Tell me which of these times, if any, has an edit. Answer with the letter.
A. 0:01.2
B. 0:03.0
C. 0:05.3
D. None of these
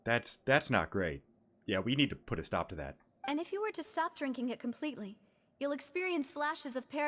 D